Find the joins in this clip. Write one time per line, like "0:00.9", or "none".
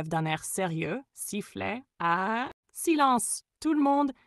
0:02.6